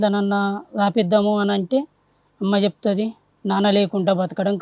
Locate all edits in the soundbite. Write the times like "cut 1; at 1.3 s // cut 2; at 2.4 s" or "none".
none